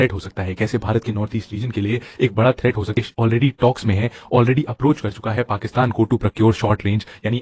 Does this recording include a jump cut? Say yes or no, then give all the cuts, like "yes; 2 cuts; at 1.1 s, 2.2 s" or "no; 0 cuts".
yes; 1 cut; at 3.0 s